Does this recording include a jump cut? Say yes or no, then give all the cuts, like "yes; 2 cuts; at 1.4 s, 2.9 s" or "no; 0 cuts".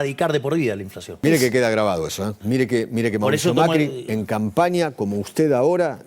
yes; 2 cuts; at 1.2 s, 2.4 s